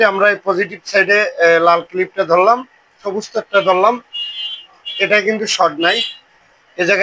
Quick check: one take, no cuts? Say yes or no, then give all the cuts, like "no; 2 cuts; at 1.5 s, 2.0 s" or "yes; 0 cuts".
no; 1 cut; at 3.1 s